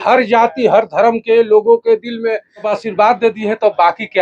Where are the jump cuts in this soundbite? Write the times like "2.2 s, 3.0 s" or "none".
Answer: 2.7 s